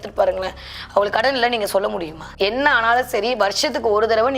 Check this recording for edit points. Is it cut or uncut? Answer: cut